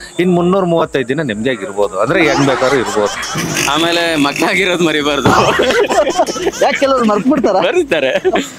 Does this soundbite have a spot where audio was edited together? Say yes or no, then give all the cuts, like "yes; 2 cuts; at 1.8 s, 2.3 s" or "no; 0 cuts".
yes; 1 cut; at 3.2 s